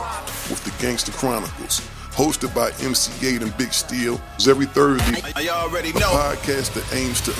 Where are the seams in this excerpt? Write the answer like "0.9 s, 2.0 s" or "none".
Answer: none